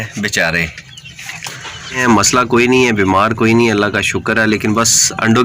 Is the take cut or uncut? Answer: cut